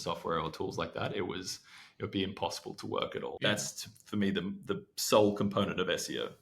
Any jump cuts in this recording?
yes; 1 cut; at 3.3 s

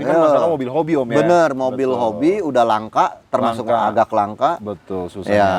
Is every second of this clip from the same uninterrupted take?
yes; 0 cuts

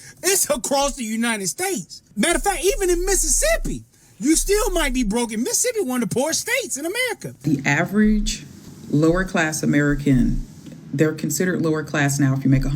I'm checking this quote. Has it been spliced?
yes; 2 cuts; at 2.1 s, 7.4 s

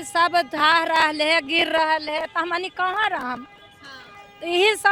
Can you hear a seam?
no; 0 cuts

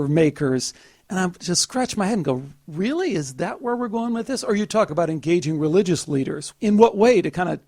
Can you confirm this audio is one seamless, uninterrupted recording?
no; 2 cuts; at 4.9 s, 6.5 s

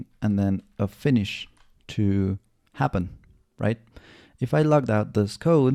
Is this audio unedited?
yes; 0 cuts

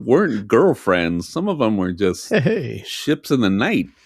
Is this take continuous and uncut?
yes; 0 cuts

